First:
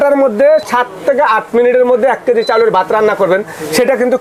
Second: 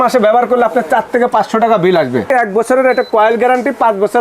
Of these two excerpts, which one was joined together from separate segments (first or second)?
second